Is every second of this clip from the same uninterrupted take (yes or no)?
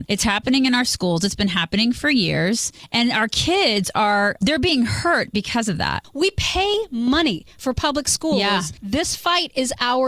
no